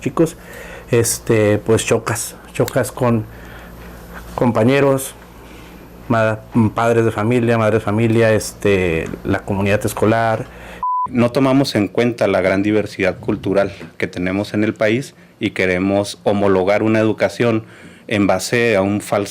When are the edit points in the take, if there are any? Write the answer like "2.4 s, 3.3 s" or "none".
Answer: 11.0 s

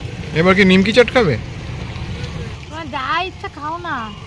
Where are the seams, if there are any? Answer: 2.6 s

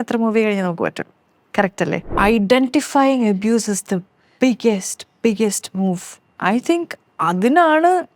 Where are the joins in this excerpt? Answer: 2.0 s

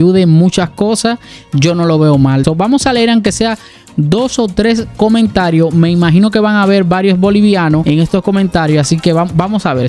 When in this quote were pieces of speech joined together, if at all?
2.4 s, 7.8 s

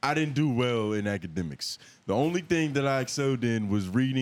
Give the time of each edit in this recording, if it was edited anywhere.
none

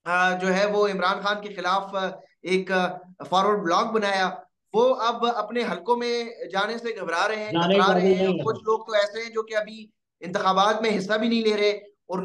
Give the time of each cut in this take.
none

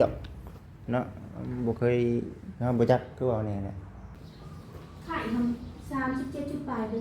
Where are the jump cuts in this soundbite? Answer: 4.2 s

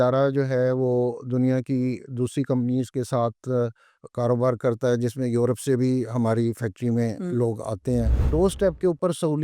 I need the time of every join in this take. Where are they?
8.2 s

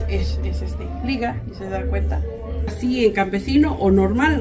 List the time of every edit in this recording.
2.7 s

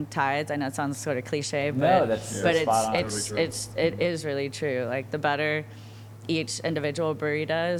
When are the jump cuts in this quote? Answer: none

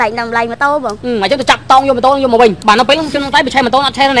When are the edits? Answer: 0.9 s, 2.6 s

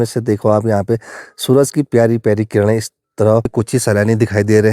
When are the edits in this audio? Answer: 3.5 s

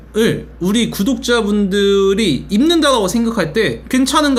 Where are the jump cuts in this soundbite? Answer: none

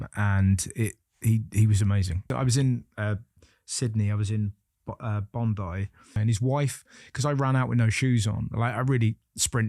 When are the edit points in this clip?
2.3 s, 6.2 s

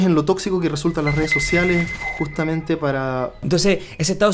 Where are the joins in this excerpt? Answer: 3.4 s

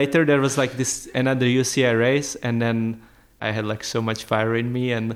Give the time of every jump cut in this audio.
3.4 s

